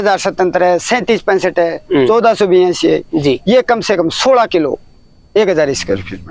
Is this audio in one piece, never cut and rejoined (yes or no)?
yes